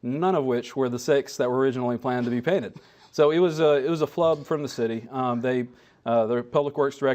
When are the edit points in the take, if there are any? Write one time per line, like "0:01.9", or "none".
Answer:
0:05.3